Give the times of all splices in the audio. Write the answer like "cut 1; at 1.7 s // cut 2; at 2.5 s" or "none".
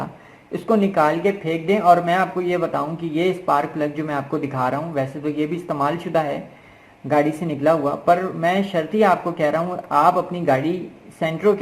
none